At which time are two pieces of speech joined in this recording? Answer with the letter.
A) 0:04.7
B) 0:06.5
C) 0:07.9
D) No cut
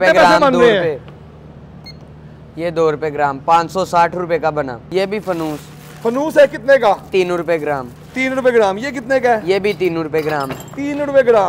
A